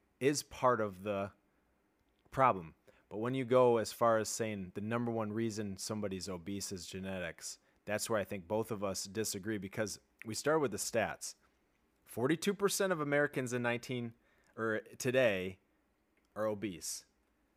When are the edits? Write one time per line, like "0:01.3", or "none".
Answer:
none